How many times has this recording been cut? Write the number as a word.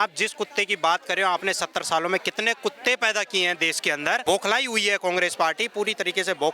one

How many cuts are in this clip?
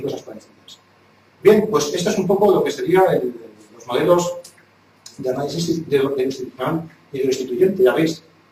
zero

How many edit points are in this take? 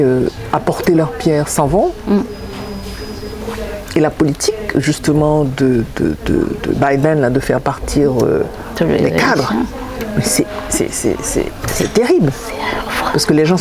zero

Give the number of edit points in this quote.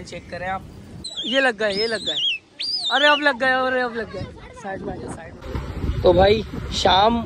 two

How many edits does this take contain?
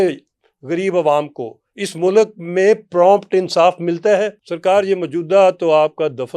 one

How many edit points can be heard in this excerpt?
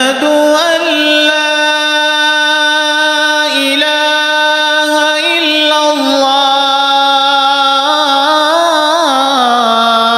zero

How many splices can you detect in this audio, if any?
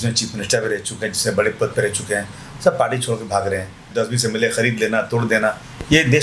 one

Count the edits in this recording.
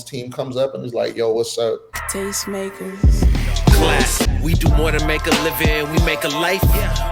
one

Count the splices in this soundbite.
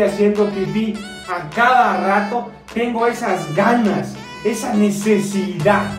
one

